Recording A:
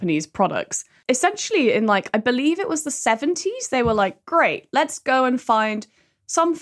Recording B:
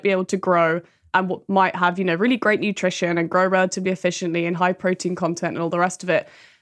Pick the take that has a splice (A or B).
A